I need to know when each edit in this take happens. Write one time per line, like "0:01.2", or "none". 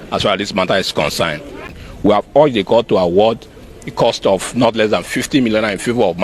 0:02.2